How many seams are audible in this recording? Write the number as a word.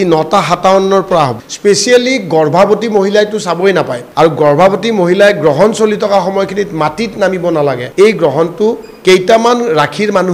three